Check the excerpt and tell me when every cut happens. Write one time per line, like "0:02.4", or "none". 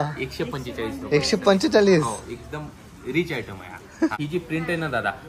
0:04.1